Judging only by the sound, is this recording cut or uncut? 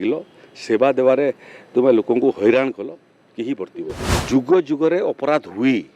cut